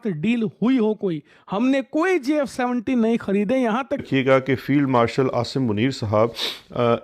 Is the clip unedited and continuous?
no; 1 cut; at 4.0 s

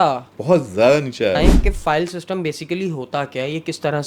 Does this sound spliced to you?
yes; 1 cut; at 1.4 s

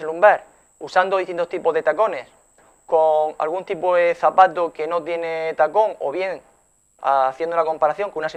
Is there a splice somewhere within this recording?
no; 0 cuts

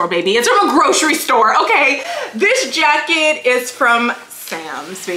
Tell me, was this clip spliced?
no; 0 cuts

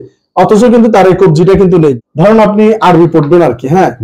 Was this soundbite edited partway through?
yes; 1 cut; at 2.1 s

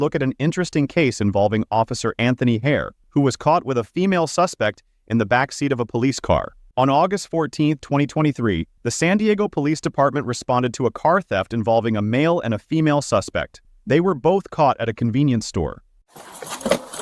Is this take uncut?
yes; 0 cuts

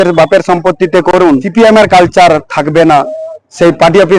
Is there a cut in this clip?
yes; 1 cut; at 1.2 s

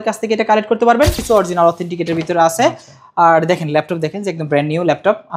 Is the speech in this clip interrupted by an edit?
yes; 1 cut; at 1.2 s

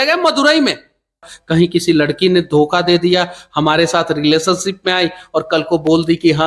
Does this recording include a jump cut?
yes; 1 cut; at 1.3 s

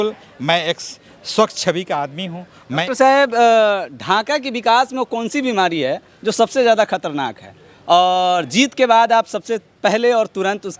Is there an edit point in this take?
yes; 1 cut; at 2.8 s

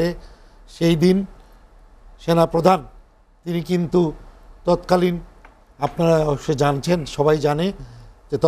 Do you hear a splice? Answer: no; 0 cuts

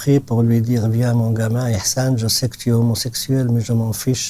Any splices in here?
no; 0 cuts

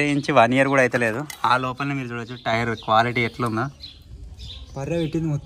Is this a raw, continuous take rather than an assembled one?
yes; 0 cuts

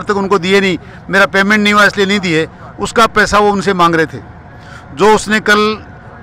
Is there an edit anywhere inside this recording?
no; 0 cuts

